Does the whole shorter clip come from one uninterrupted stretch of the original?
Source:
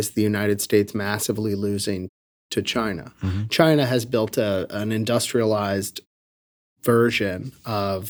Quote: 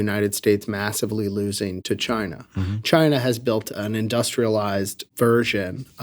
no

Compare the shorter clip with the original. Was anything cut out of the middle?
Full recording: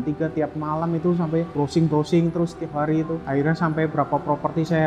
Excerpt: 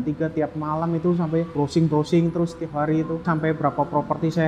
yes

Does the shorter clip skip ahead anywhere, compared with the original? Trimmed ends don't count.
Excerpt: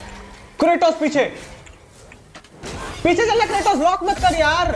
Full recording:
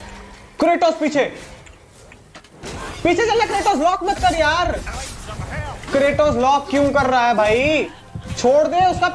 no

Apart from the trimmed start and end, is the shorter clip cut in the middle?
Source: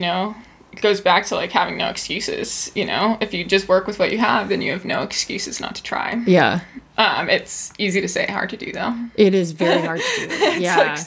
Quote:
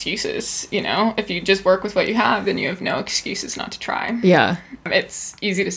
yes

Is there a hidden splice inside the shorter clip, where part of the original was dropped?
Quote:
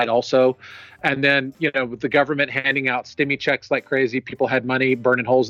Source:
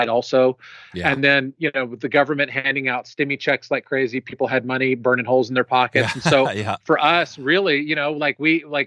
no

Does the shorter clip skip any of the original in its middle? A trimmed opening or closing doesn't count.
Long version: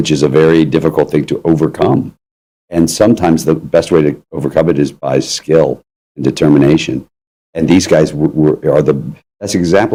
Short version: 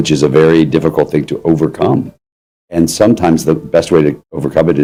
no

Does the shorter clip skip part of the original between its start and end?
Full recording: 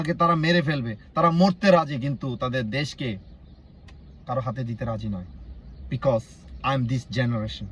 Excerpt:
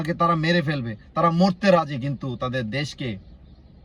no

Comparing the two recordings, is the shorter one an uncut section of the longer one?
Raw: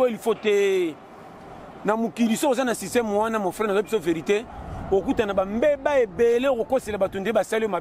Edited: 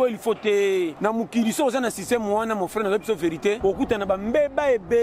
no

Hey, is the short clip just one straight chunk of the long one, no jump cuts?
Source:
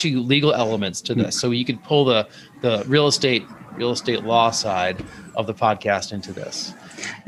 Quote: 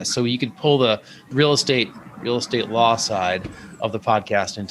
no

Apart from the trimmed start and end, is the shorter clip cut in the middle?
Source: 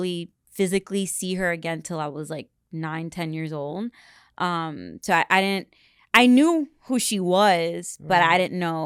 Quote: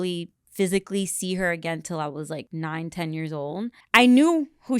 yes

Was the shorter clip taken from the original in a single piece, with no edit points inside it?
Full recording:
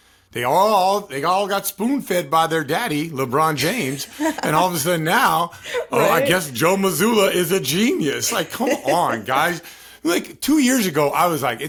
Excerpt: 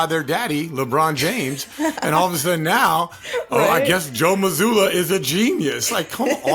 yes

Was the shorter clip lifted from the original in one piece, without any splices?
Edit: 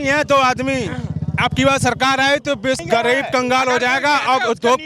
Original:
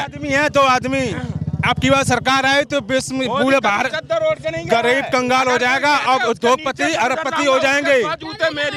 no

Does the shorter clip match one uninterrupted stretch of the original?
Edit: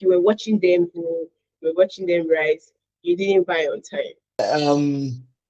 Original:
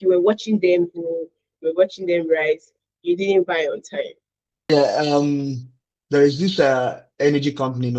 no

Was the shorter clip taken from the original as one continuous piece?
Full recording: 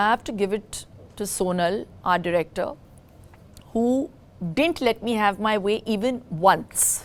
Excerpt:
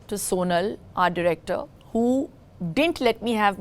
no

